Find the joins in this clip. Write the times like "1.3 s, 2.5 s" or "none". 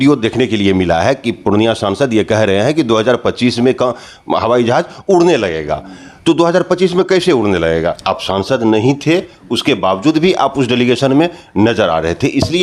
8.0 s

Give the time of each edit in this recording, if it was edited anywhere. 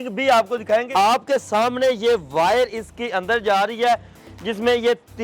0.9 s, 4.1 s

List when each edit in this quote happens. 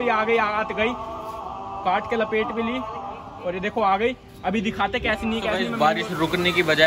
5.6 s

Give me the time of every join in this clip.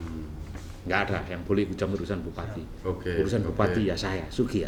none

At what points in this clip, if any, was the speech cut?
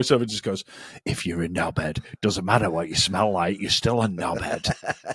none

